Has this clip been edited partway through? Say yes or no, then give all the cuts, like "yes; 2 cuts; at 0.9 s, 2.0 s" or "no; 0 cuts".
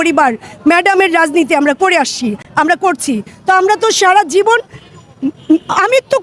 no; 0 cuts